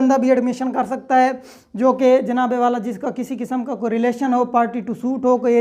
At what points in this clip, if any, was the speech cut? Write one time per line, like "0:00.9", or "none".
none